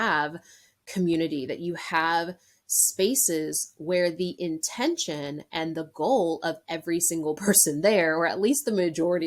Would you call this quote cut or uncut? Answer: uncut